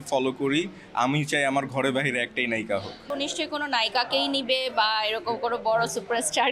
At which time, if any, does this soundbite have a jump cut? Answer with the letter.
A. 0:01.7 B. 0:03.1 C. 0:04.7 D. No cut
B